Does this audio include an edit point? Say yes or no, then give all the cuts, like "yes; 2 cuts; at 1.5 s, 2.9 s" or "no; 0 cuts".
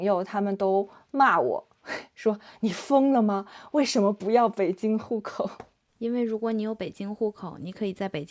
no; 0 cuts